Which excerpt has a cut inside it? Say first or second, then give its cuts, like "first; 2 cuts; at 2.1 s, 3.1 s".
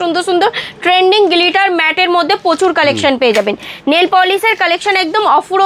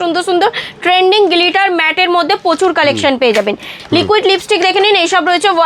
second; 1 cut; at 3.7 s